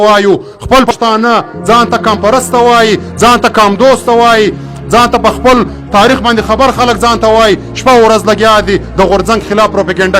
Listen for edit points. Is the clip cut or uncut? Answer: cut